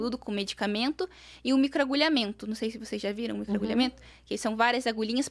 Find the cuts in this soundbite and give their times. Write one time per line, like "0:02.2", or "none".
none